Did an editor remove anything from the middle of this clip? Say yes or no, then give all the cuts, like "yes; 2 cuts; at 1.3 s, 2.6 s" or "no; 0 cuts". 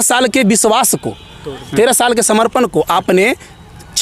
no; 0 cuts